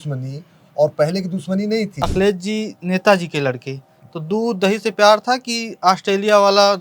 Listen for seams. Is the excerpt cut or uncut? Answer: cut